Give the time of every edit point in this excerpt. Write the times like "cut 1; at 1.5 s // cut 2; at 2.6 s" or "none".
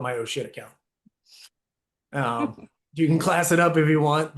none